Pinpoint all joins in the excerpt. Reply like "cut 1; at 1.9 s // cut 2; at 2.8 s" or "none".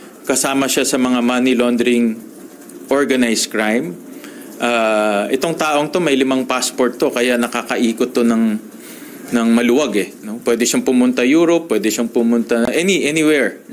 none